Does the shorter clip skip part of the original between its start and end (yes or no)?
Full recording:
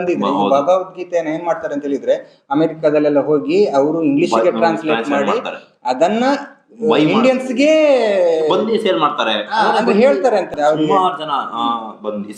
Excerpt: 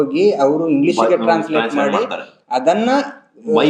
no